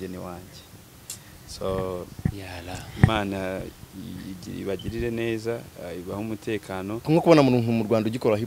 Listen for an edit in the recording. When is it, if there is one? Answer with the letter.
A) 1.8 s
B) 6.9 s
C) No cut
B